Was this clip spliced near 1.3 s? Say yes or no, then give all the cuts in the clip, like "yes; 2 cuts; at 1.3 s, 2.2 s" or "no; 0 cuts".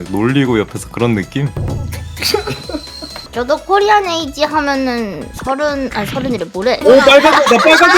no; 2 cuts; at 3.0 s, 6.8 s